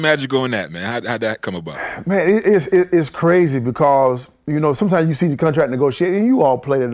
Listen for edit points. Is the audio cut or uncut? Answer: uncut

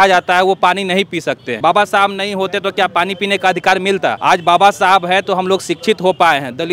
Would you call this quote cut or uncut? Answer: cut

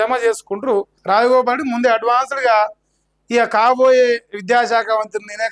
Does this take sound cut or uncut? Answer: cut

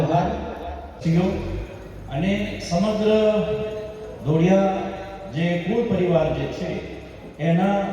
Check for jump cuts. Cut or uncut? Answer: cut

